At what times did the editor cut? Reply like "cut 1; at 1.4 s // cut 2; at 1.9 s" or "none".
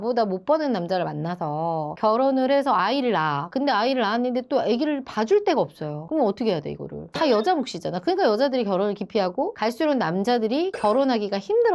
none